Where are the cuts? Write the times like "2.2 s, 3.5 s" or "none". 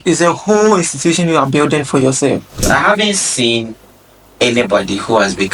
2.6 s